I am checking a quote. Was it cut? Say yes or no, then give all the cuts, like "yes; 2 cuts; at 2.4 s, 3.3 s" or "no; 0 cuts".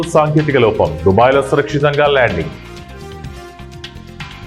yes; 1 cut; at 2.7 s